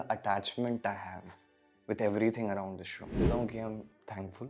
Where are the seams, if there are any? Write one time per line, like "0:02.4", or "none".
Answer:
0:03.2